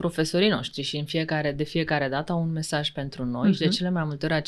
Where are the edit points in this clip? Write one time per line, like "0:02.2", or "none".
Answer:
none